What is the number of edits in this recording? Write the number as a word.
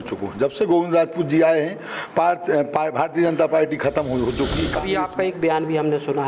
one